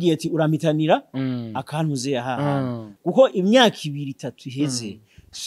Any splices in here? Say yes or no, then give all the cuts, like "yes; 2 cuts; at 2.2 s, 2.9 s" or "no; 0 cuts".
yes; 1 cut; at 2.9 s